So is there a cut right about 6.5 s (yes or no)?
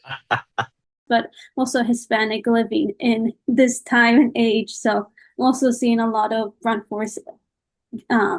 no